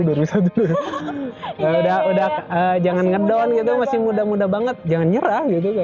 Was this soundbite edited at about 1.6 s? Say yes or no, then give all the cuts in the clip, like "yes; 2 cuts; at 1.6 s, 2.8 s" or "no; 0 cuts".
no; 1 cut; at 4.8 s